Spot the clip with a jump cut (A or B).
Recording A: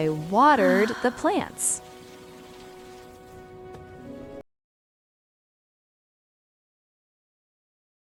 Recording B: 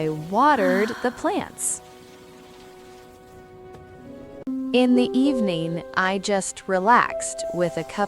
B